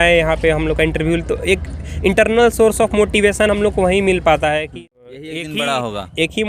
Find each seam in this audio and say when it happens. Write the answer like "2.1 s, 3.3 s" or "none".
4.7 s